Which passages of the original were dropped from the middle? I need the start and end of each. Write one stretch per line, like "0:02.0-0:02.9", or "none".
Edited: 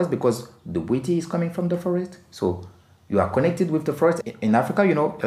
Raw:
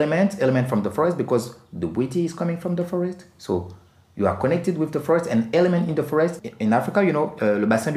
0:05.3-0:06.4